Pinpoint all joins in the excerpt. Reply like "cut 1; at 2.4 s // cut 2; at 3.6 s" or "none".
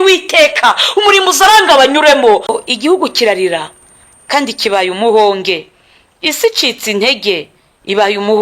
cut 1; at 2.5 s